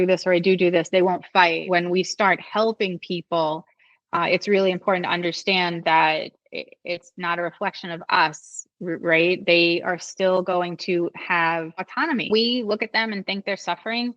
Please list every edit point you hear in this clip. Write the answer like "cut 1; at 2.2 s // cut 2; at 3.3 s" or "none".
cut 1; at 1.6 s // cut 2; at 12.3 s